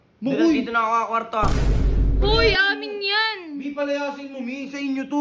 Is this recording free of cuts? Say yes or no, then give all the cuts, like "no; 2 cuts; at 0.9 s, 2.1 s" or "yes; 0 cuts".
no; 1 cut; at 1.9 s